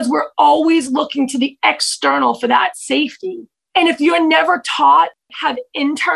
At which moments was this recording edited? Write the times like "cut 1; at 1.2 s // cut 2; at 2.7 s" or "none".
cut 1; at 3.5 s // cut 2; at 5.2 s

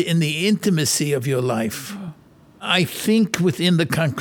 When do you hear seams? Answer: cut 1; at 2.6 s

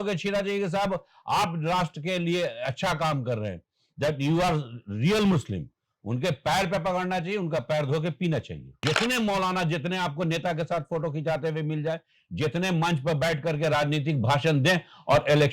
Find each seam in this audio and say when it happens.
cut 1; at 8.8 s

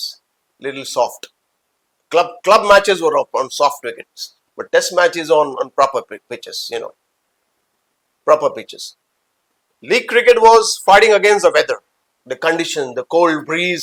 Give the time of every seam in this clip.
none

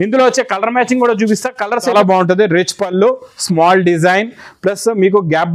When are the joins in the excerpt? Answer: cut 1; at 1.9 s

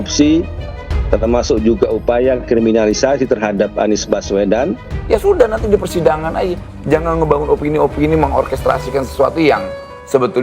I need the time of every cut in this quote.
cut 1; at 4.9 s

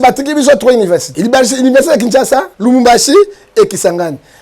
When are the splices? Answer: cut 1; at 1.1 s // cut 2; at 2.5 s

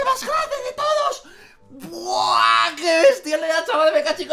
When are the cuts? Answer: none

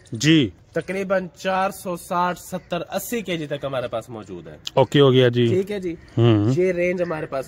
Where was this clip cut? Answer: none

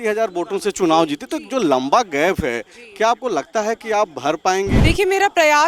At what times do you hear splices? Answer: cut 1; at 4.8 s

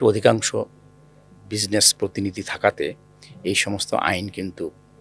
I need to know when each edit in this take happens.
none

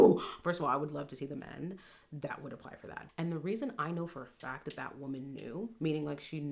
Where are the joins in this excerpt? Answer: cut 1; at 3.0 s

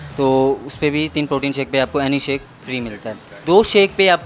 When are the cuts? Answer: cut 1; at 3.1 s

